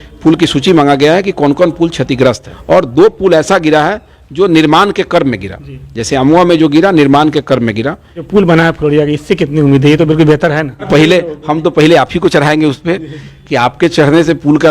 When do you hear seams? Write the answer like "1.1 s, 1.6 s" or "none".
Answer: 2.5 s, 8.3 s, 10.9 s